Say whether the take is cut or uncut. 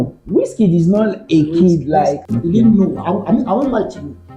cut